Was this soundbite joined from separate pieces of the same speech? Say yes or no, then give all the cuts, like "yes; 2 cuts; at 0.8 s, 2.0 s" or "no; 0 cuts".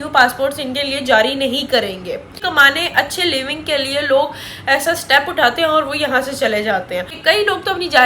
yes; 2 cuts; at 2.4 s, 7.1 s